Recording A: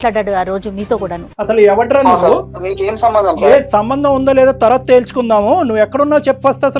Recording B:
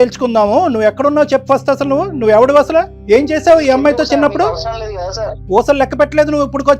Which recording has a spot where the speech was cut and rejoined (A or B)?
B